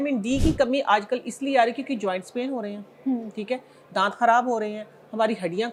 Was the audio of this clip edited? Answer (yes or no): no